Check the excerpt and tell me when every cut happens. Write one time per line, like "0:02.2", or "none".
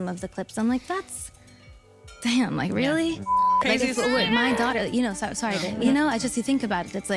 0:02.2
0:03.3
0:05.8